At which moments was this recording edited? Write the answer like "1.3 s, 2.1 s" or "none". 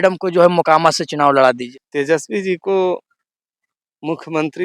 1.7 s